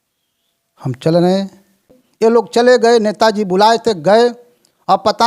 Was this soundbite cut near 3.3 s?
no; 1 cut; at 2.0 s

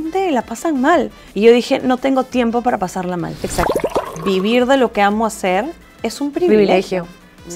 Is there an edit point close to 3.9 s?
yes; 2 cuts; at 1.2 s, 3.9 s

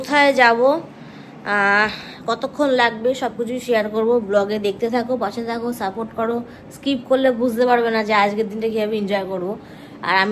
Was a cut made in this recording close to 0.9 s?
no; 0 cuts

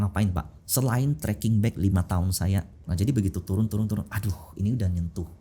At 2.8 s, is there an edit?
yes; 1 cut; at 2.8 s

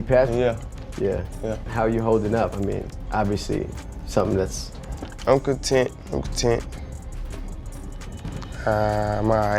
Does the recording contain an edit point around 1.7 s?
yes; 1 cut; at 1.7 s

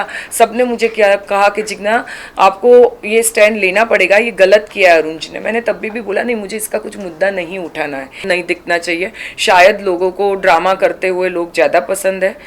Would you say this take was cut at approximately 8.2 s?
yes; 1 cut; at 8.2 s

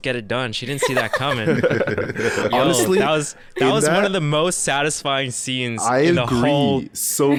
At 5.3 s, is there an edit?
no; 0 cuts

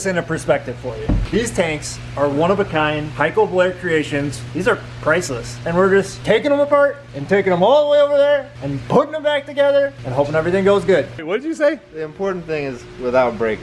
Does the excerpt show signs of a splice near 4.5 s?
yes; 2 cuts; at 4.5 s, 11.2 s

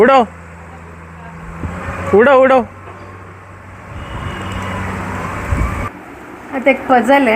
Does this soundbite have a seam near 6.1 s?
yes; 1 cut; at 6.1 s

